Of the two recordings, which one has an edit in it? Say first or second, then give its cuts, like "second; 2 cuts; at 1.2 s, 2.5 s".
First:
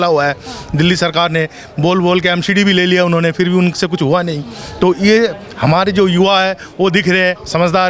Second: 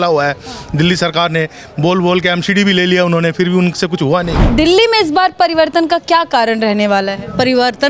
second; 1 cut; at 4.4 s